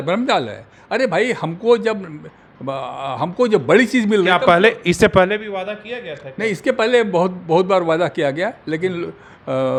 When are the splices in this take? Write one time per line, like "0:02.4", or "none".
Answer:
none